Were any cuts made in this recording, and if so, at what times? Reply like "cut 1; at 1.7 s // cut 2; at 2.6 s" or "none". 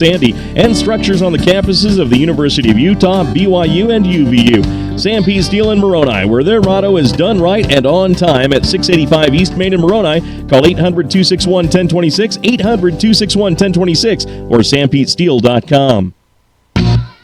cut 1; at 16.2 s